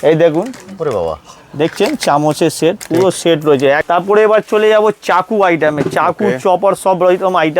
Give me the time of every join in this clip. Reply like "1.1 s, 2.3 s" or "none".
3.8 s

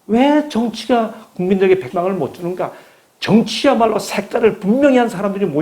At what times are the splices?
1.9 s

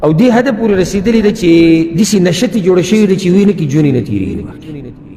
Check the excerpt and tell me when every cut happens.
1.9 s

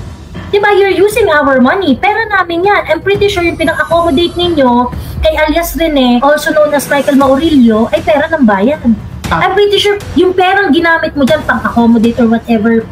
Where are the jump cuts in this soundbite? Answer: 6.2 s

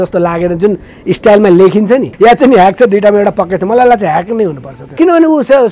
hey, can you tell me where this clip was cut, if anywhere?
2.1 s, 4.9 s

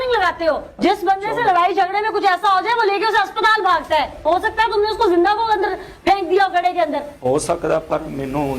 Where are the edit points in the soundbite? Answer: 4.2 s

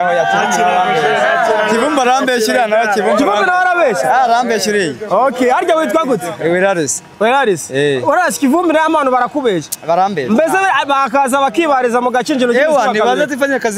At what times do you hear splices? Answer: none

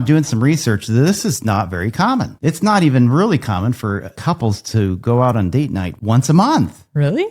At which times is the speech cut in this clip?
2.3 s, 4.1 s, 5.9 s

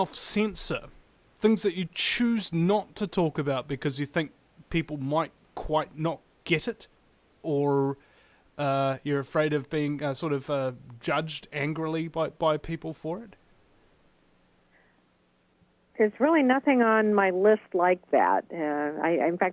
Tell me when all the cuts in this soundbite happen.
none

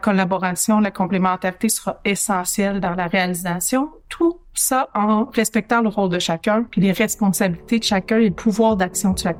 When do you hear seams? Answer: none

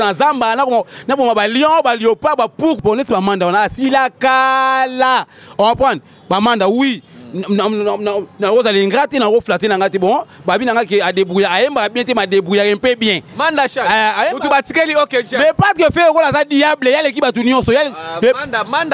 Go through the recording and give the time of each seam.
2.8 s

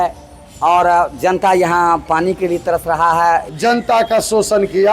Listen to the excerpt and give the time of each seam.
3.5 s

